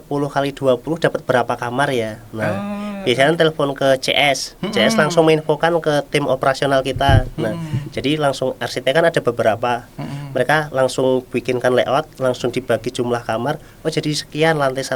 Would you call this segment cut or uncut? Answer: uncut